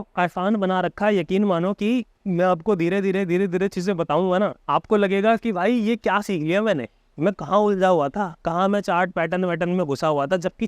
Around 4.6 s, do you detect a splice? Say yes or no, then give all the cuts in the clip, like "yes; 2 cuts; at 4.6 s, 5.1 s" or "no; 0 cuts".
yes; 2 cuts; at 2.2 s, 4.6 s